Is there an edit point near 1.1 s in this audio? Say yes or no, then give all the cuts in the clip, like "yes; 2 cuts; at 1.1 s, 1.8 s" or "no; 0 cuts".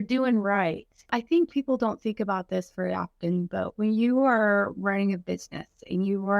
yes; 1 cut; at 1.1 s